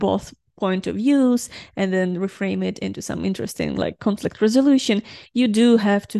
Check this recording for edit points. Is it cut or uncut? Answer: uncut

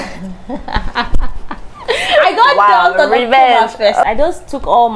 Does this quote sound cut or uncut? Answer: cut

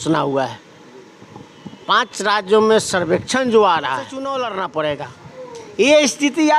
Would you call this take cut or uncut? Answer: cut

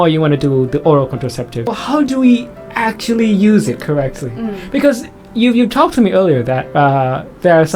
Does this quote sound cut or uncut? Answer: cut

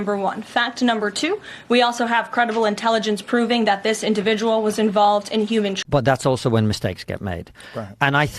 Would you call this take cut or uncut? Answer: cut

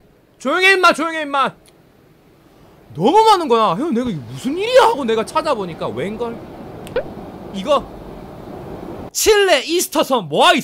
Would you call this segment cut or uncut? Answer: cut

